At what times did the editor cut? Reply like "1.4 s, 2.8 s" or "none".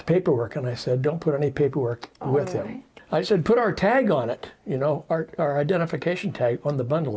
none